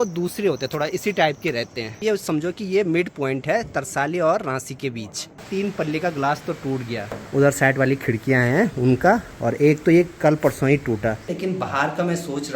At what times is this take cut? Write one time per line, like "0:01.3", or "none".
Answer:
0:02.0
0:05.4
0:07.1
0:11.3